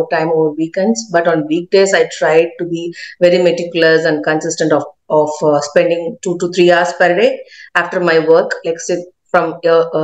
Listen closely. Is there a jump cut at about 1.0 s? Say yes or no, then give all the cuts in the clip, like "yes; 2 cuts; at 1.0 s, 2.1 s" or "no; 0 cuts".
no; 0 cuts